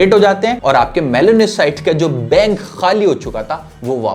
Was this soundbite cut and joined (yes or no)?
no